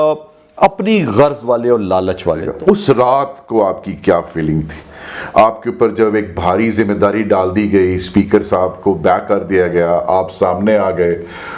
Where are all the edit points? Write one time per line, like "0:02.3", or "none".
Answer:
0:02.5